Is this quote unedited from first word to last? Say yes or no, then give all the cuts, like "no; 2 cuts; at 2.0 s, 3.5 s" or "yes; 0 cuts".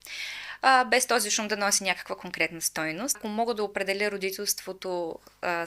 no; 1 cut; at 3.2 s